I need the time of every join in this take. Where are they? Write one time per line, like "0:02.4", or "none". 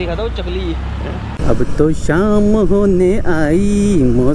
0:01.4